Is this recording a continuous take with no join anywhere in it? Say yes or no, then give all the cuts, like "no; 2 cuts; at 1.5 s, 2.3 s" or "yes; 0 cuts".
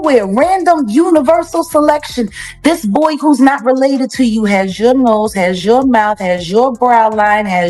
yes; 0 cuts